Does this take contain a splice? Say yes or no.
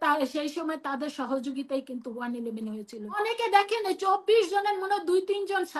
yes